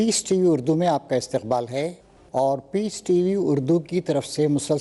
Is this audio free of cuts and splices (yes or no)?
yes